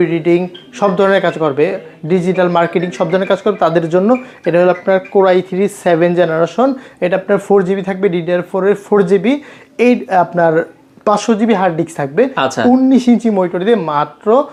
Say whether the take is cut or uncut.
uncut